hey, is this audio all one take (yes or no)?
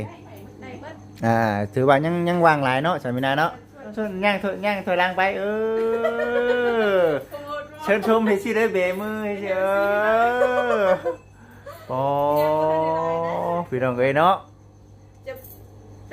no